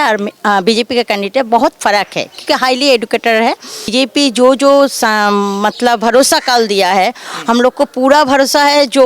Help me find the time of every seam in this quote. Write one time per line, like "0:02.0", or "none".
0:03.9